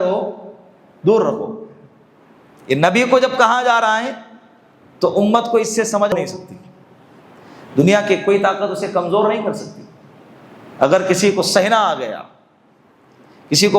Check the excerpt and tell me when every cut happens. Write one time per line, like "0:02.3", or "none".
0:06.1